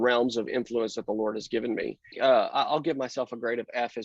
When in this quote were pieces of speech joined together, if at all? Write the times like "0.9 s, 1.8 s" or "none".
2.2 s